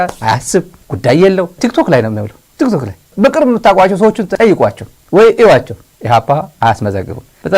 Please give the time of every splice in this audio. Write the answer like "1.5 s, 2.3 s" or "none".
none